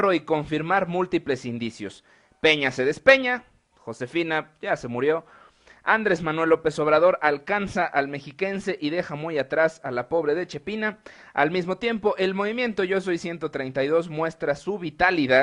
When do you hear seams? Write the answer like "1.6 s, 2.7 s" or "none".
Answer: 1.0 s